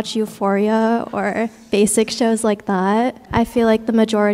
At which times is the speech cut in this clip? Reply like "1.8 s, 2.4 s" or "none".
3.3 s